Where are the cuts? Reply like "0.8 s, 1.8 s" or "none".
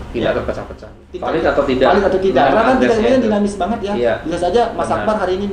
1.2 s